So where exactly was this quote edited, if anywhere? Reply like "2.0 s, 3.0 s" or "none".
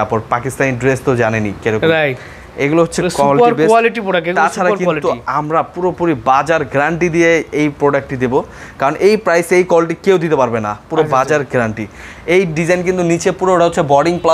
none